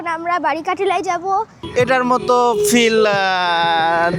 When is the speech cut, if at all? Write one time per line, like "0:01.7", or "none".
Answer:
0:01.6